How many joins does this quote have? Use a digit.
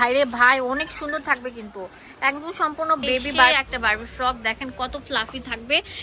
1